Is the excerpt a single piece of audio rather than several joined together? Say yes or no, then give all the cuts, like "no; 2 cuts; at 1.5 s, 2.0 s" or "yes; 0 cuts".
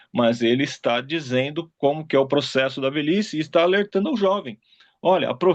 yes; 0 cuts